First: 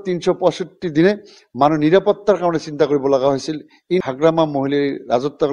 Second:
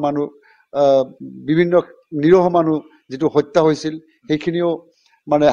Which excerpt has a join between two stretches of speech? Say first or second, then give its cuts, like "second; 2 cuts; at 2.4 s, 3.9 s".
first; 1 cut; at 4.1 s